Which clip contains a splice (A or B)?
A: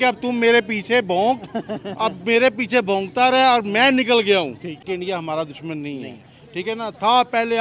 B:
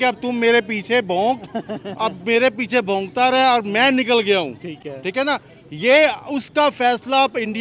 A